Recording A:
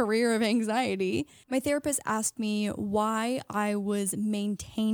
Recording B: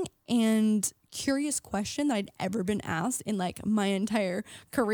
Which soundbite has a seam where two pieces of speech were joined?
A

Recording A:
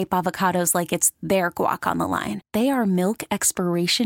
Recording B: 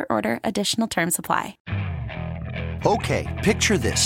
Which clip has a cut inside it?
B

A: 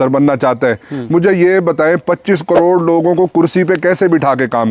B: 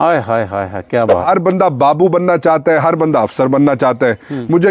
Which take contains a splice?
B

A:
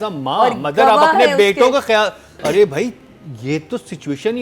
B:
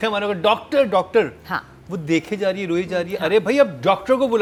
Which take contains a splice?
A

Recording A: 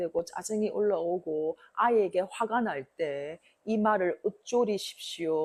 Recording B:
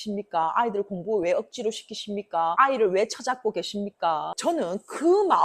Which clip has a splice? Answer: B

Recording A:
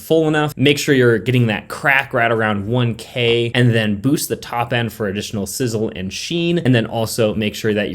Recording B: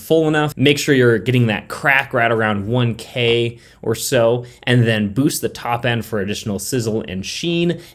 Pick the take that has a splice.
A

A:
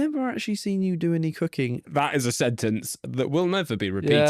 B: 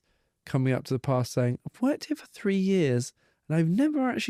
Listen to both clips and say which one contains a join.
A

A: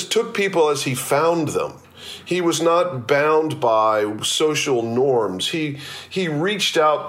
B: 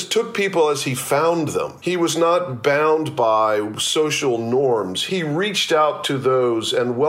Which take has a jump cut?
B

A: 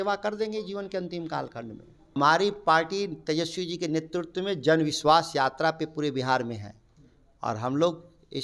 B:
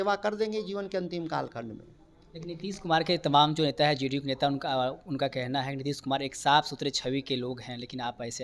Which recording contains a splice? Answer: A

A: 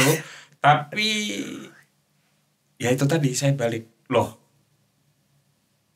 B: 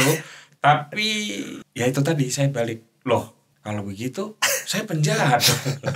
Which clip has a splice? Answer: B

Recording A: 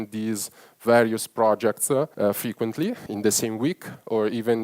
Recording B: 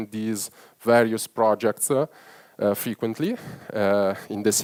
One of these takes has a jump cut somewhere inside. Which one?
A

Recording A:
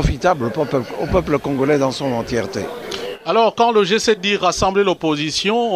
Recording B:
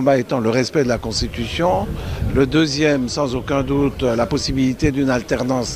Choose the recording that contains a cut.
B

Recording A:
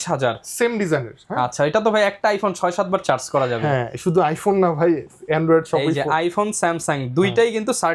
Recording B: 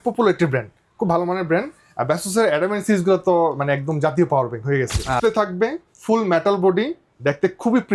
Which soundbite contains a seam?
B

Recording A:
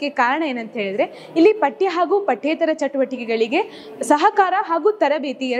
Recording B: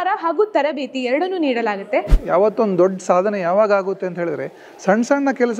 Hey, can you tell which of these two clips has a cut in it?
B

